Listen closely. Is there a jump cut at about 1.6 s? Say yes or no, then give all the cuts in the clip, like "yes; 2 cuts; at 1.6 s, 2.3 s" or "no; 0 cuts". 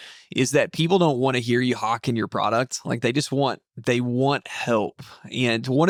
no; 0 cuts